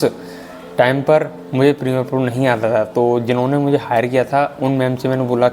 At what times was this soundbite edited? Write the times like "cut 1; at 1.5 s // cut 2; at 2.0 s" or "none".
none